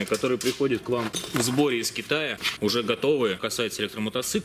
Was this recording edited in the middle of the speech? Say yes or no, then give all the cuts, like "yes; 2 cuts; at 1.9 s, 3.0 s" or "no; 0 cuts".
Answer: yes; 3 cuts; at 1.2 s, 2.4 s, 3.4 s